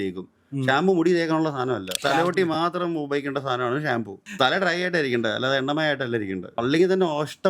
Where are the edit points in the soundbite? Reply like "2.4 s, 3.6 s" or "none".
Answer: 2.0 s, 4.3 s, 6.6 s